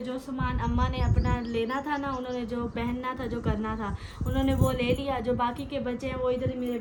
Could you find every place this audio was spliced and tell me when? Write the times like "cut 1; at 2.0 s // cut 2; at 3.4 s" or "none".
none

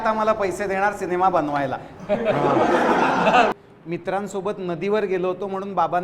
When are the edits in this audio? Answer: cut 1; at 3.5 s

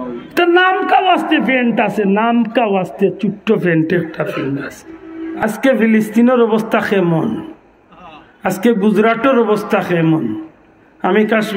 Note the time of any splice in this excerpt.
cut 1; at 5.4 s

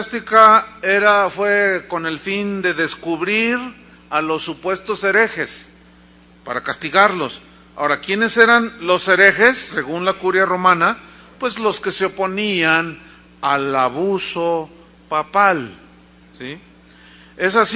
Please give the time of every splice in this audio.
cut 1; at 10.8 s

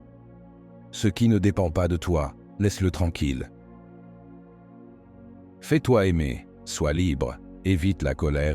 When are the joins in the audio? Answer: none

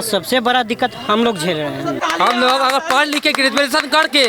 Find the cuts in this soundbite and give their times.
cut 1; at 2.0 s

